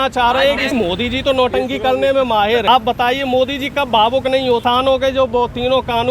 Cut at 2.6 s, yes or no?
yes